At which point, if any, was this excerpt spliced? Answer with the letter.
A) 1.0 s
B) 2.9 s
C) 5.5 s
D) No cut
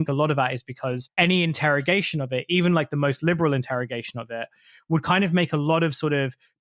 A